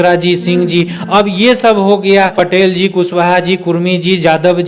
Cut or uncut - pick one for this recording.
cut